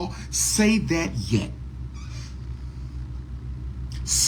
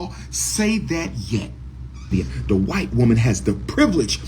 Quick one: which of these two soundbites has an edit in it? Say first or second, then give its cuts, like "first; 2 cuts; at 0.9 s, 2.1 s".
second; 1 cut; at 2.1 s